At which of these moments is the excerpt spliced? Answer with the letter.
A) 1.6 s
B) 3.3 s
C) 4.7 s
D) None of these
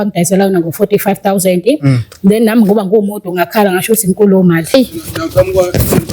C